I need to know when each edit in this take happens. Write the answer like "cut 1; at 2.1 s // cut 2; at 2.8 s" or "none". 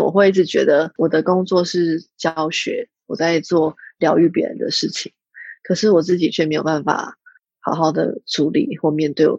cut 1; at 0.9 s